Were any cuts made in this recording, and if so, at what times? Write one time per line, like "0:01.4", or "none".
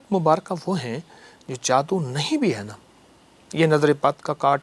none